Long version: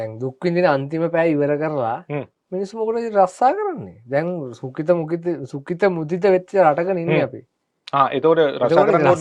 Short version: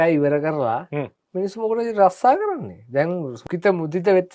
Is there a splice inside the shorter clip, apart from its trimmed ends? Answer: yes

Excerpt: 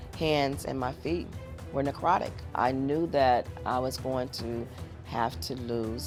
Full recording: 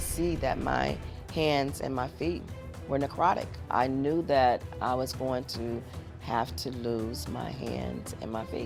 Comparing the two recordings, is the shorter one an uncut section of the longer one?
yes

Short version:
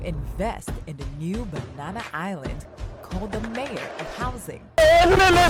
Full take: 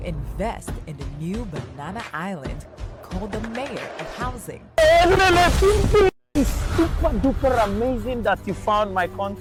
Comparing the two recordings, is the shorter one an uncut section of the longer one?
yes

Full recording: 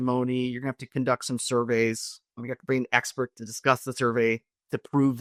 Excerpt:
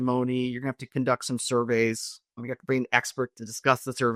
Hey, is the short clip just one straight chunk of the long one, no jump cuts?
yes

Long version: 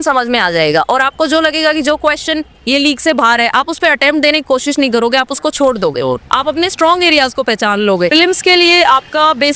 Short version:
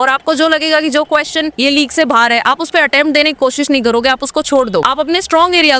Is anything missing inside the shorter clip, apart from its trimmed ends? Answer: yes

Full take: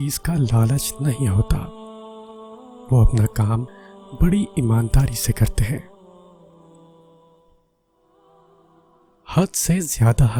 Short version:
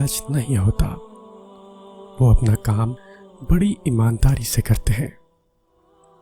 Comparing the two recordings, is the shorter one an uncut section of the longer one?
no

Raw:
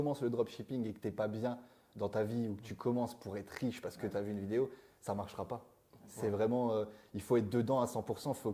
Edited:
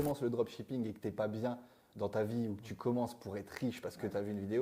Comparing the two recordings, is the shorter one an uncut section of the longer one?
yes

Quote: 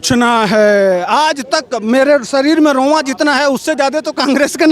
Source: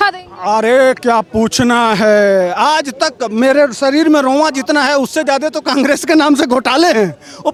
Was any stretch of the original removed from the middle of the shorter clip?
no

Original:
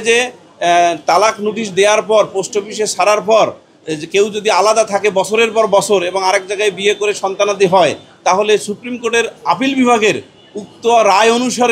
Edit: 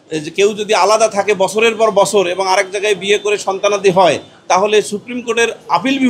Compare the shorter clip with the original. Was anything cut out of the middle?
no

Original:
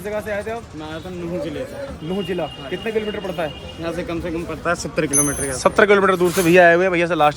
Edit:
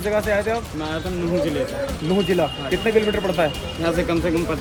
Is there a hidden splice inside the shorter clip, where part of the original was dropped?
no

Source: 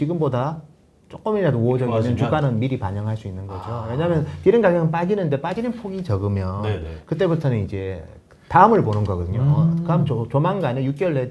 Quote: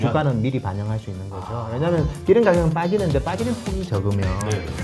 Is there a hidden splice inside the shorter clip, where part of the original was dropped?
no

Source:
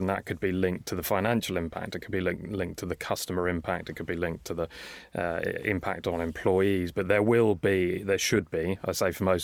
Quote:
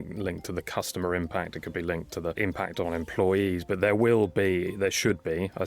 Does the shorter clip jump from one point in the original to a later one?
yes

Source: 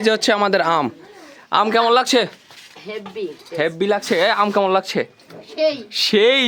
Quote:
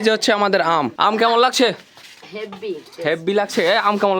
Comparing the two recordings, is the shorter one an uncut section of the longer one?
no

